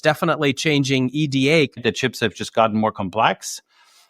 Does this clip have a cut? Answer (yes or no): yes